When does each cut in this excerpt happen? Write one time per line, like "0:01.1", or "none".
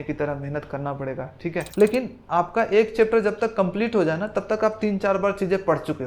0:01.6